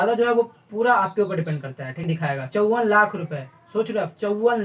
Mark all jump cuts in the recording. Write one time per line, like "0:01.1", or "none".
0:02.0